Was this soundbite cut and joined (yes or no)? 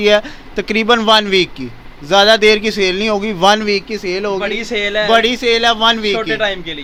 no